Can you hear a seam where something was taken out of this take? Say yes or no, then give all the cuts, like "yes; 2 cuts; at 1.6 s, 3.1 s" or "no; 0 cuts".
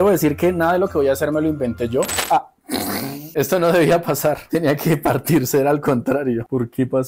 yes; 1 cut; at 2.3 s